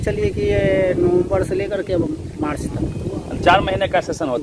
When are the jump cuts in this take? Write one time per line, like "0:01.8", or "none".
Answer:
none